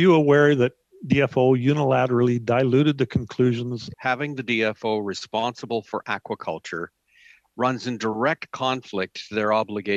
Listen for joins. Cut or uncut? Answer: cut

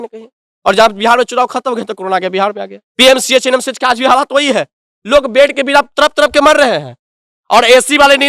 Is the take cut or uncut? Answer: cut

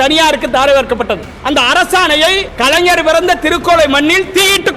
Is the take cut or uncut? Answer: cut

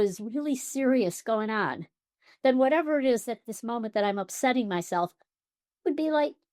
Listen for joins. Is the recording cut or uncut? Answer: uncut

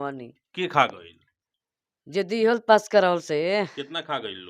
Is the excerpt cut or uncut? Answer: uncut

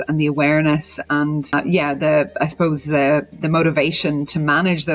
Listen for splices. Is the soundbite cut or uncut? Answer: cut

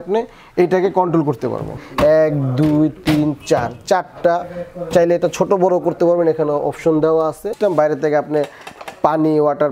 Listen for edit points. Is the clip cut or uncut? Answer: cut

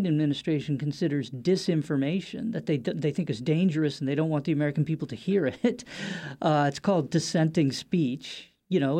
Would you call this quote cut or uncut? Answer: uncut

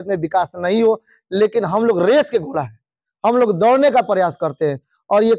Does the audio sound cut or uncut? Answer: uncut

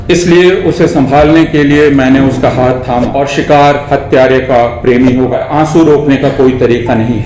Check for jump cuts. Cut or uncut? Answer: cut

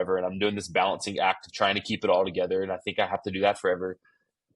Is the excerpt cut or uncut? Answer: uncut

